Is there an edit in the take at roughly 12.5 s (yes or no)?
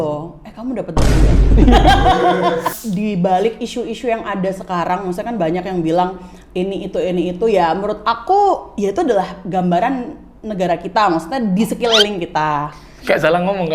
no